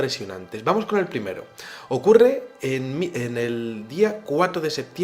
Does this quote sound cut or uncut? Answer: cut